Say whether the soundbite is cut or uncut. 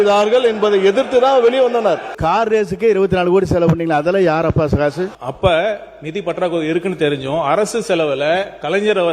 cut